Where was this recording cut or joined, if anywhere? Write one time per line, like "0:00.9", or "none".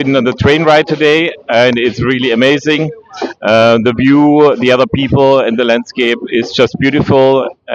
none